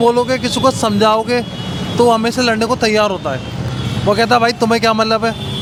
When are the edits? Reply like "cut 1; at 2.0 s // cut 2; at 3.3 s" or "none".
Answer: none